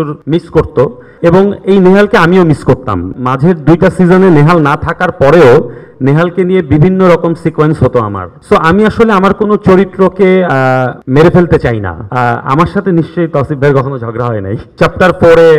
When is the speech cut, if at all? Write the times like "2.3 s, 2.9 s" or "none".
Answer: 1.1 s, 3.1 s, 8.3 s, 12.1 s, 14.7 s